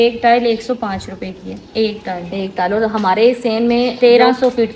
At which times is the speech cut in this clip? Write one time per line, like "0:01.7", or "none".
none